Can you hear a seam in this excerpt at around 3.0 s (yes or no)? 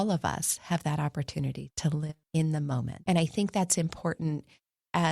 yes